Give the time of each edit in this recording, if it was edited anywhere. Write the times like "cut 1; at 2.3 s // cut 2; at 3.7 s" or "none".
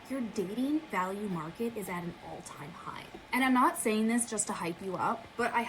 cut 1; at 3.2 s